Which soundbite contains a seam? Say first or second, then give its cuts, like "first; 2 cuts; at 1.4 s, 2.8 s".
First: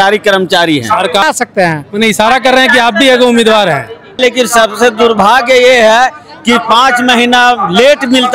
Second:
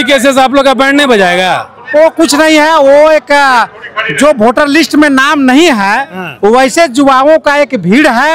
first; 2 cuts; at 1.2 s, 4.2 s